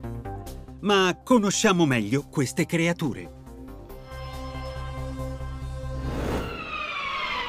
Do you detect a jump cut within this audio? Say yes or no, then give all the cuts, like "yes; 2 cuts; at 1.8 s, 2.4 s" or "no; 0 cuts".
yes; 1 cut; at 6.6 s